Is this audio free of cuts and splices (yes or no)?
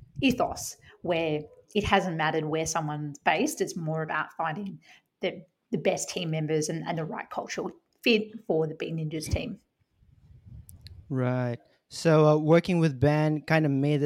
yes